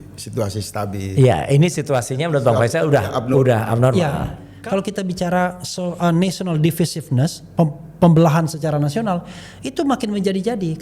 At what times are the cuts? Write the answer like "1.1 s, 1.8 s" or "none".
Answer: 4.5 s